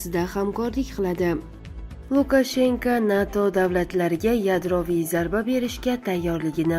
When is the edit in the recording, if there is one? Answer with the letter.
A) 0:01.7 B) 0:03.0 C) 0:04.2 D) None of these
A